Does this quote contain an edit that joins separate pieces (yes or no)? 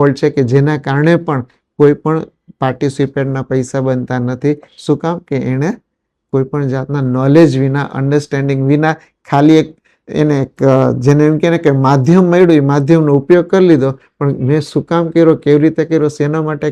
no